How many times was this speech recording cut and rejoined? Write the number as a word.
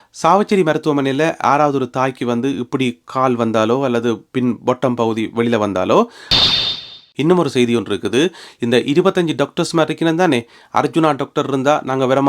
one